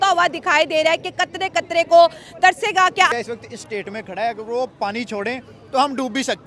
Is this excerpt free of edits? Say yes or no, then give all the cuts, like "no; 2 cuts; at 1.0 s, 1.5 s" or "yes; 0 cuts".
no; 1 cut; at 3.1 s